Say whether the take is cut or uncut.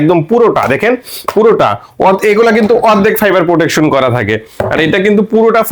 uncut